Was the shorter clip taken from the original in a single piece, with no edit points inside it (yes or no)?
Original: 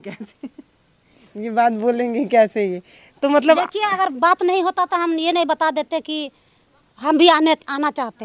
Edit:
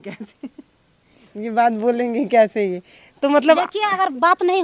yes